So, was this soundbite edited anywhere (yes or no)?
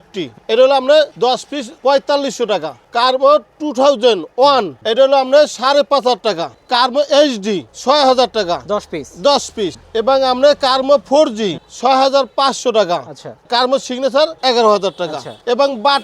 no